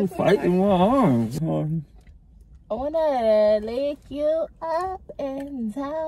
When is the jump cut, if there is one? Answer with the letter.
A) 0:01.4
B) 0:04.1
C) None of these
A